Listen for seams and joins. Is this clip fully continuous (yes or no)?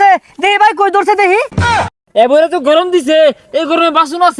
no